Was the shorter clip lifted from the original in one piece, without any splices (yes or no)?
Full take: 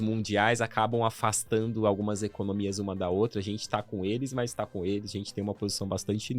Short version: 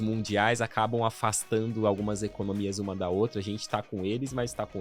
yes